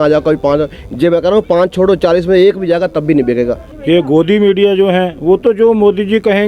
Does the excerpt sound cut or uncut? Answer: cut